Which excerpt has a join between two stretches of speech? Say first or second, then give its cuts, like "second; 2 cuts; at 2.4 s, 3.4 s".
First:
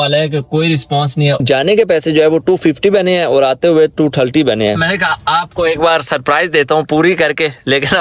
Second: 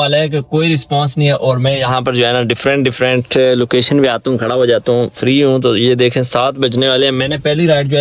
first; 2 cuts; at 1.4 s, 4.8 s